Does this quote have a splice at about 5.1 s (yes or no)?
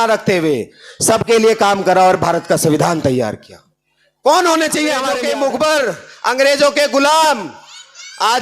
yes